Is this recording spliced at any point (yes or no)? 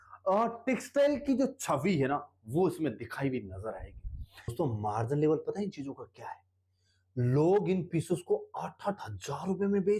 yes